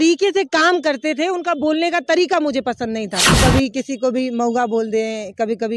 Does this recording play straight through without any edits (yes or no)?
no